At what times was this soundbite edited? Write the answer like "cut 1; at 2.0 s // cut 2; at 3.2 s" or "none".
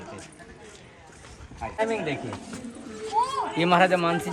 none